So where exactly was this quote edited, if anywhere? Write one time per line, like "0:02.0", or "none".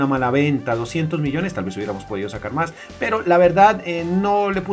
none